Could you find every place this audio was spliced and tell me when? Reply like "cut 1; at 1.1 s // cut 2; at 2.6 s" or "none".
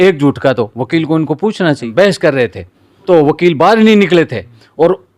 cut 1; at 1.8 s // cut 2; at 3.0 s

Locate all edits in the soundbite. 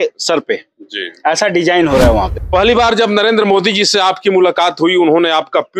cut 1; at 2.4 s

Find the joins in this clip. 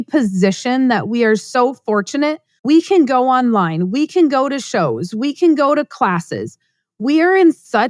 cut 1; at 2.5 s

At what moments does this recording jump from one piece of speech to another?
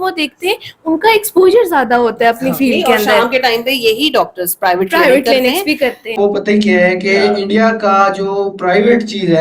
cut 1; at 6.0 s

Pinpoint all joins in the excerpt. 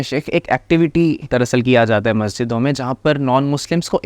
cut 1; at 1.2 s

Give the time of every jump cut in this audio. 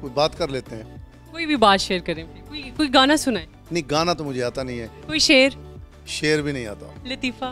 none

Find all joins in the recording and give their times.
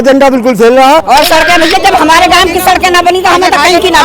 cut 1; at 1.0 s

